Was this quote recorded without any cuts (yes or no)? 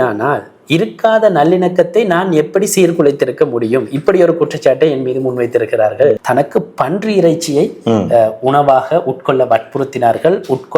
no